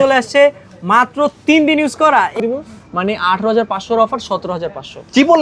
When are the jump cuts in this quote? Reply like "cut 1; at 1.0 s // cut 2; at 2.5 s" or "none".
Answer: cut 1; at 2.4 s